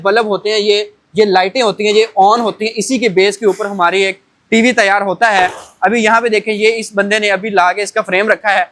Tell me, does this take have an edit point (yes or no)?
no